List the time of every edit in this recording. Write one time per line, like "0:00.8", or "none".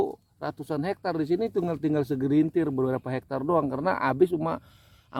none